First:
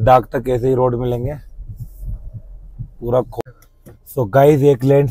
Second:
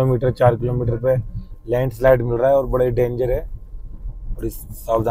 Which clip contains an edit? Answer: first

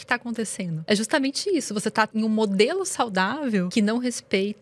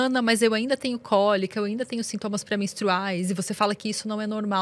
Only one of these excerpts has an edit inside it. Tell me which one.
first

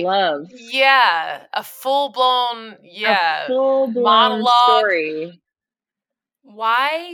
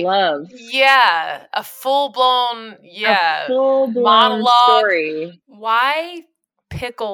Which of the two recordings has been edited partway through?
second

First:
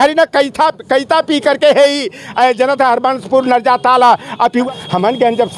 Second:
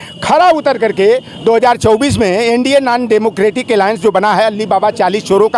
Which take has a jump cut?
first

